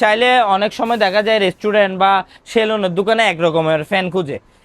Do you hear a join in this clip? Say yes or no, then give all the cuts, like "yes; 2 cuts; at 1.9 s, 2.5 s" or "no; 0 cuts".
no; 0 cuts